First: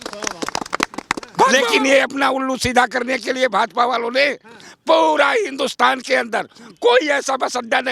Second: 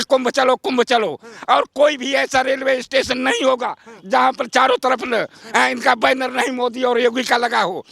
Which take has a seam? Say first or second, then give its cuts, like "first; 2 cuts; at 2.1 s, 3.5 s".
first; 1 cut; at 1.5 s